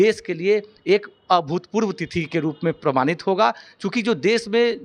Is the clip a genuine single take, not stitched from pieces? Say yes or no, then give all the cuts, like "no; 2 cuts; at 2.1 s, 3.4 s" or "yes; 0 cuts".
yes; 0 cuts